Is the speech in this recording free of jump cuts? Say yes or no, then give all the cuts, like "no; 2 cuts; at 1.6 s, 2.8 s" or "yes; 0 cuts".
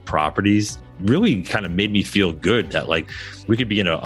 no; 1 cut; at 3.0 s